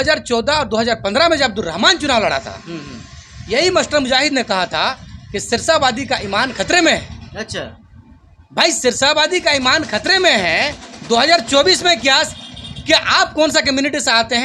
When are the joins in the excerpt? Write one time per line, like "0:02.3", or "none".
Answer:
none